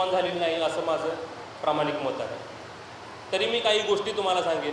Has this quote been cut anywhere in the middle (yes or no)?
no